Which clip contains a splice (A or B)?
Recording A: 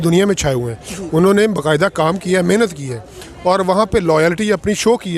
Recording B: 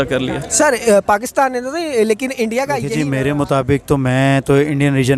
B